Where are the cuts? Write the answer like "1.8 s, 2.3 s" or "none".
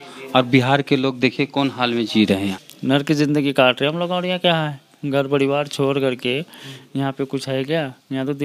2.6 s